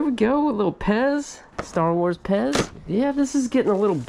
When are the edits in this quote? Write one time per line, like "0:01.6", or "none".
none